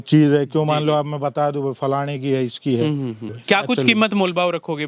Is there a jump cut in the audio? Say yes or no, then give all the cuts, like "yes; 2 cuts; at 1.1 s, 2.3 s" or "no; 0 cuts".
yes; 1 cut; at 3.3 s